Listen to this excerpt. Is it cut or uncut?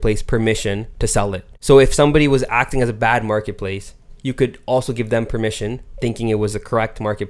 cut